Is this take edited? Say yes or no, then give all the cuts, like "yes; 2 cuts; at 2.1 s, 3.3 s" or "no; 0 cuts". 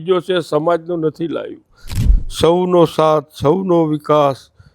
yes; 1 cut; at 1.9 s